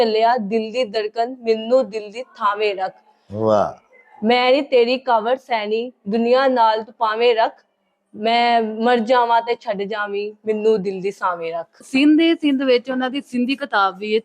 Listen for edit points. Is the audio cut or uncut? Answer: cut